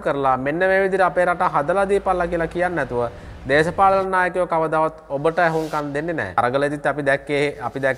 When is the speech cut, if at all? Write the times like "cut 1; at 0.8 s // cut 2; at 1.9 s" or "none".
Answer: cut 1; at 6.4 s